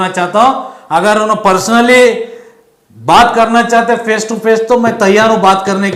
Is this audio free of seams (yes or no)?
yes